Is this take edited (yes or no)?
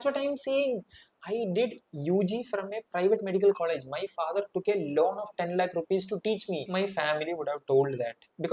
yes